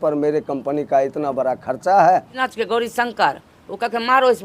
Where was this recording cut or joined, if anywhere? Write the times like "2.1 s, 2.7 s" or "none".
2.3 s